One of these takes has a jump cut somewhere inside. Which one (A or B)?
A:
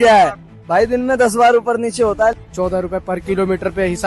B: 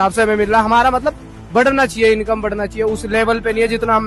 A